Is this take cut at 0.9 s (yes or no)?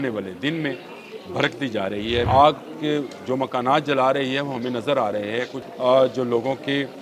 no